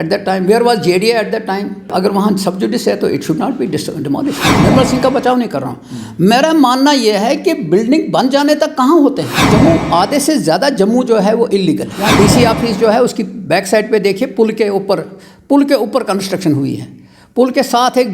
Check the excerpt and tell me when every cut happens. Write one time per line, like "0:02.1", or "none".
0:01.9
0:04.5
0:09.4
0:12.0